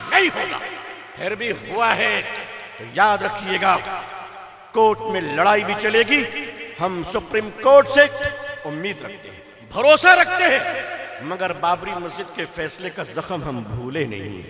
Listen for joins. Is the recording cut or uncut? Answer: uncut